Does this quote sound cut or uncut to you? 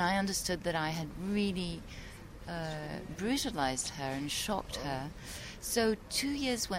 uncut